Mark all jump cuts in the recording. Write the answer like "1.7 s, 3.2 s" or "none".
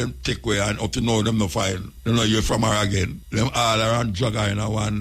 1.9 s, 3.2 s